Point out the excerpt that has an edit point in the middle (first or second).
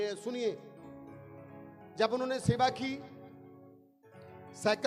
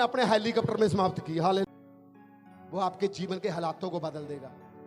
second